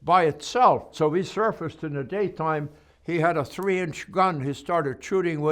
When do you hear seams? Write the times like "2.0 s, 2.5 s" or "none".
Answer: 0.9 s